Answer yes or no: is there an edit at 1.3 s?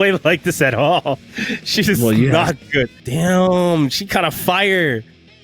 no